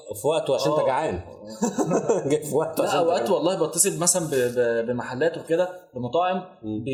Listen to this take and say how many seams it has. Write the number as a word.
zero